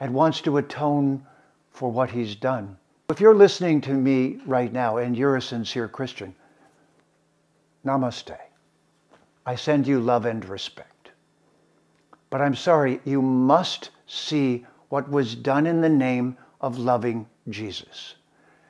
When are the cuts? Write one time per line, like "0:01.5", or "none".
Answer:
0:03.1